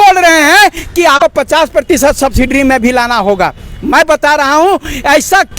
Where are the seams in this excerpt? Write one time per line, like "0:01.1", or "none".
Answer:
0:01.2